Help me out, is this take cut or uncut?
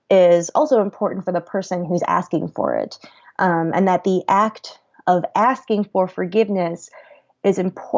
uncut